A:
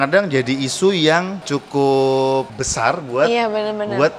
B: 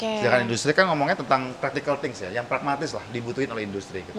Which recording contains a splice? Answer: A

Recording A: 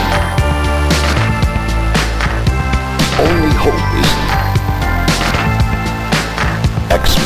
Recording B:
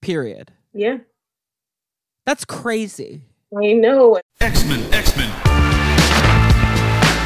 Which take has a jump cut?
B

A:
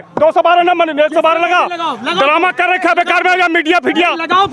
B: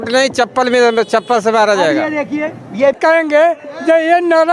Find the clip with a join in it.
B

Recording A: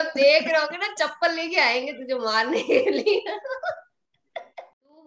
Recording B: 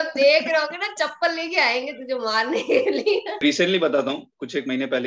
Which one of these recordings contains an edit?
B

